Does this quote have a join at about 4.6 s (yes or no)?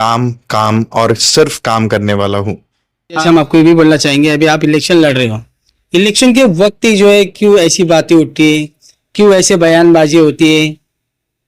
no